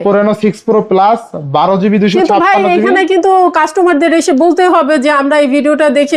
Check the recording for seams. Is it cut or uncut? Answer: uncut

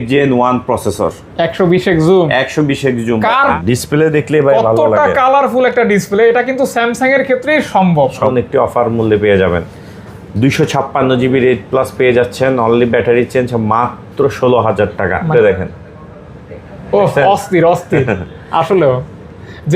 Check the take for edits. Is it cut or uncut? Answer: cut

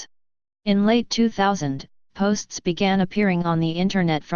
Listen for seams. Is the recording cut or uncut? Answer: cut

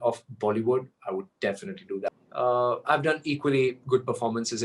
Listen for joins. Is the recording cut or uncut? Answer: cut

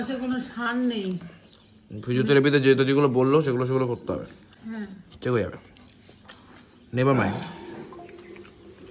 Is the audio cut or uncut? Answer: uncut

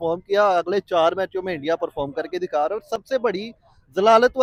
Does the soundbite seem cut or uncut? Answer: uncut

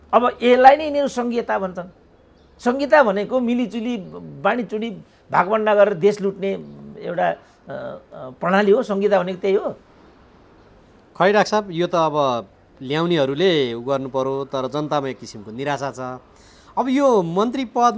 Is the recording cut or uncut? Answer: uncut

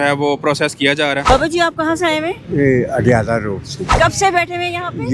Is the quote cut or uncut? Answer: cut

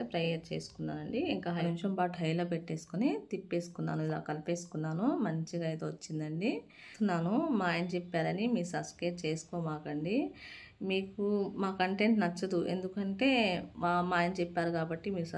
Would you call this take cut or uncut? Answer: cut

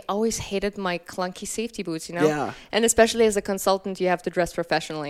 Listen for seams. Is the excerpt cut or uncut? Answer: cut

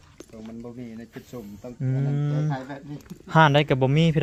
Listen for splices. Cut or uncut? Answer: uncut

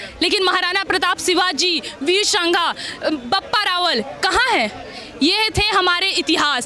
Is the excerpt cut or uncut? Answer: uncut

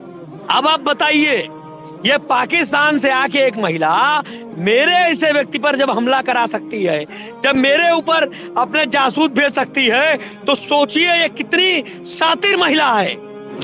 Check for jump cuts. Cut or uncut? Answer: uncut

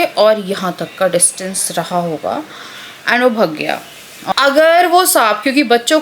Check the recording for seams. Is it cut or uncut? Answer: cut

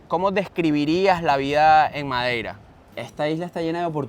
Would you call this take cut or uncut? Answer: cut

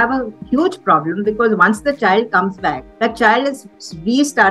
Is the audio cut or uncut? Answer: cut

